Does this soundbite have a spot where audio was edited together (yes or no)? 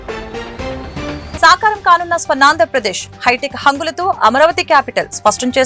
yes